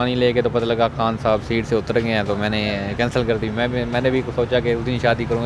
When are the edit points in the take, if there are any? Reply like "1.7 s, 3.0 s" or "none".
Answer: none